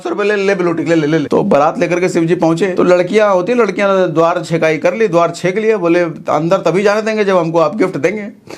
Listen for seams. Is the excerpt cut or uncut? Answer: cut